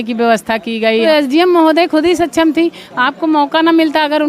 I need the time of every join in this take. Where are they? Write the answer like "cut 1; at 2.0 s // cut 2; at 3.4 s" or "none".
cut 1; at 1.1 s